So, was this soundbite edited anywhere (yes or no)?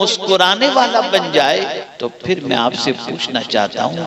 yes